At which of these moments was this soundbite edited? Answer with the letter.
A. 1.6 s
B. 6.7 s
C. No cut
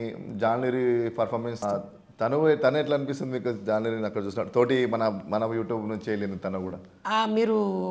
A